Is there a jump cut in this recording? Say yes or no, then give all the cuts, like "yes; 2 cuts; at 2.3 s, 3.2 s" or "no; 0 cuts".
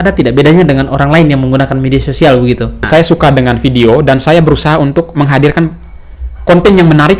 yes; 1 cut; at 2.8 s